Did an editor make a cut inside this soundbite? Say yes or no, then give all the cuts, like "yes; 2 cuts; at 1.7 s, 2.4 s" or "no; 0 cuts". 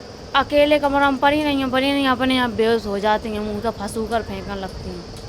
no; 0 cuts